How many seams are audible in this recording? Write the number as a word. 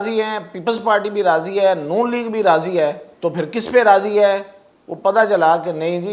one